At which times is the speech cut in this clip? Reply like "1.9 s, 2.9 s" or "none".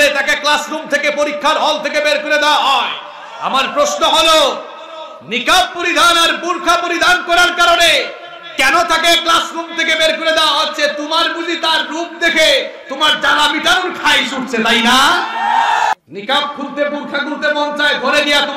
none